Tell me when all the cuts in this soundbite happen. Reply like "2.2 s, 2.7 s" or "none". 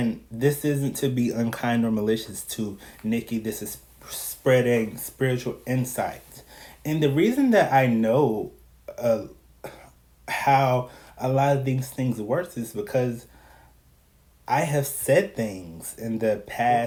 none